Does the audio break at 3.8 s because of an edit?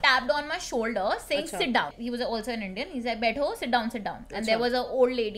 no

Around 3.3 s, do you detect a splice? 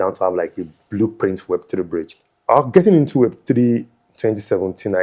no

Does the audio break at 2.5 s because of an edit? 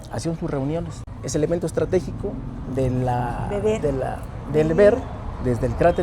no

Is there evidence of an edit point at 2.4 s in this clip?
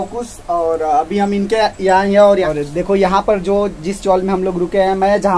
yes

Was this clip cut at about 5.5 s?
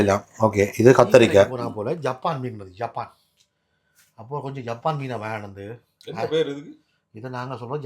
no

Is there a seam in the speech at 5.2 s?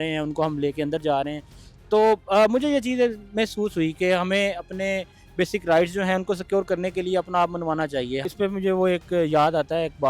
no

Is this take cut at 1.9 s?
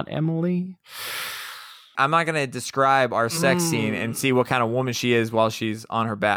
yes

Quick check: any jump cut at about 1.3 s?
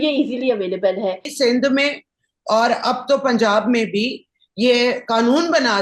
yes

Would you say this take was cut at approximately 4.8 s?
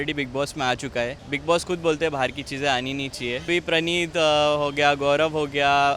no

